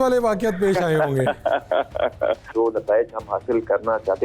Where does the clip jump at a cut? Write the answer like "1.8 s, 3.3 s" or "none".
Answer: 2.5 s

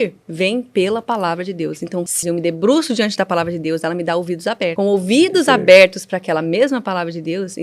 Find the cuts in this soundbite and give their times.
2.2 s, 4.7 s

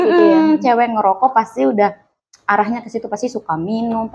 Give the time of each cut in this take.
none

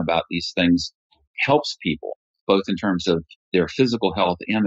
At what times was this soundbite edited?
none

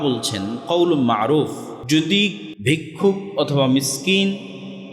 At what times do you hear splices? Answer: 1.7 s, 2.5 s

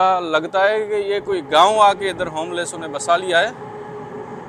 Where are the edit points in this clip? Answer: none

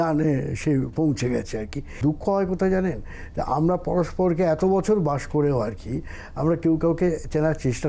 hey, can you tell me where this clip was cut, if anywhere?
2.0 s

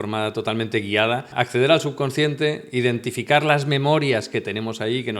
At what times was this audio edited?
1.3 s

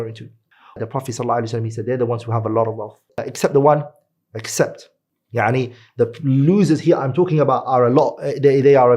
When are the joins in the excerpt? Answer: 0.8 s, 3.2 s

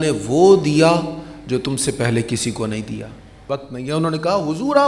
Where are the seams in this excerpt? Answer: 3.4 s

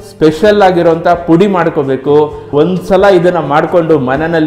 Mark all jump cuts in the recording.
2.5 s

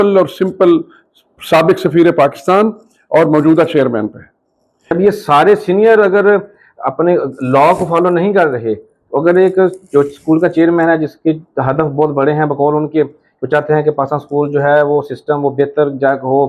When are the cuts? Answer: 4.9 s

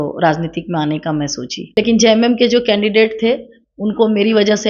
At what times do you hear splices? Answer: 1.5 s

